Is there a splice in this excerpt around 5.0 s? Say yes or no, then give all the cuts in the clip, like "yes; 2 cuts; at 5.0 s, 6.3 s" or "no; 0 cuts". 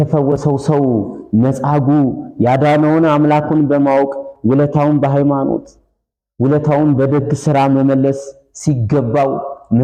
no; 0 cuts